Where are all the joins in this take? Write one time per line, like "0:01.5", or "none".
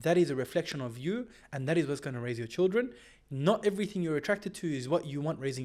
none